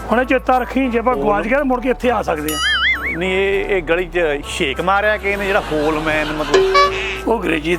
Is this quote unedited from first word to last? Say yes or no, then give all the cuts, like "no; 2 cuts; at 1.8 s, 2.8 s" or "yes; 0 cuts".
yes; 0 cuts